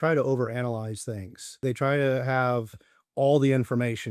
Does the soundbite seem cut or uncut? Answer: cut